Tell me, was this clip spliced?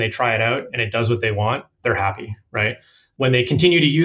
no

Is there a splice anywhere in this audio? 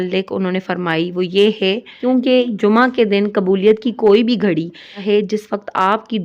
yes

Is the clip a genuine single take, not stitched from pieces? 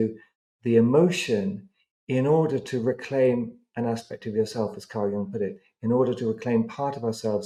yes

